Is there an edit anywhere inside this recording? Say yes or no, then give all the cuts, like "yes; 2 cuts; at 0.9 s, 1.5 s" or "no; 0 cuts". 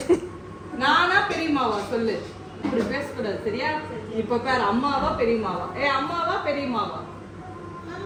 no; 0 cuts